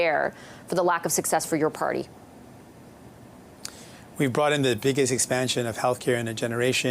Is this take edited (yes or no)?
no